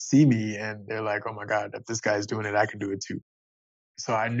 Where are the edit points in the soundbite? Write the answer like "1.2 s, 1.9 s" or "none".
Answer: 3.4 s

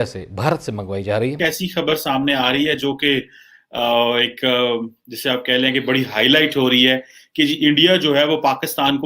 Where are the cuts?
1.4 s

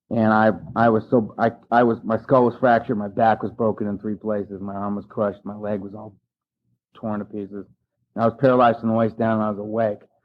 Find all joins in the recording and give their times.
8.0 s

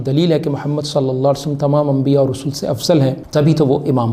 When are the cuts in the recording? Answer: 3.2 s

